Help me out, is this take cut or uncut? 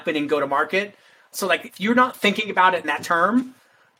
cut